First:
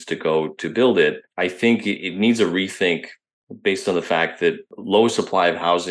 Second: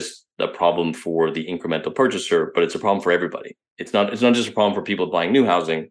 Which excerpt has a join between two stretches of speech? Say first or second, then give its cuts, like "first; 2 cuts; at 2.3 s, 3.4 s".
first; 2 cuts; at 1.7 s, 4.7 s